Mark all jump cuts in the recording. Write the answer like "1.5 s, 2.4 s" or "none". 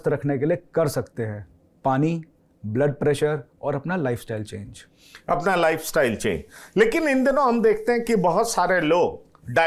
none